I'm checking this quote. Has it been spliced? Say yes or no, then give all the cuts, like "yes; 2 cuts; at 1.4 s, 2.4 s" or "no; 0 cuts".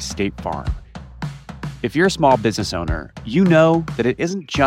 no; 0 cuts